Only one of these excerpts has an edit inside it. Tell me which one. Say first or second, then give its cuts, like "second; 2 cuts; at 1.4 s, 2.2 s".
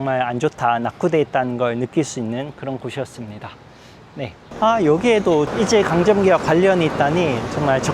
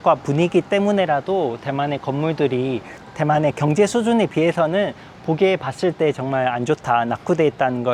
first; 1 cut; at 4.3 s